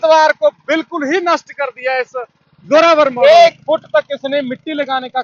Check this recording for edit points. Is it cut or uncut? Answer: cut